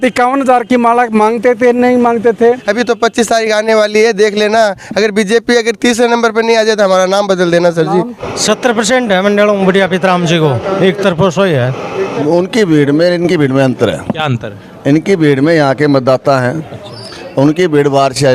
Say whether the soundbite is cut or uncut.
cut